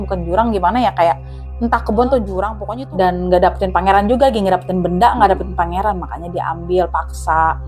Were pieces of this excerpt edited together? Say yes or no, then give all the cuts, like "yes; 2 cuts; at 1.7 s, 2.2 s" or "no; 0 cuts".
yes; 1 cut; at 2.6 s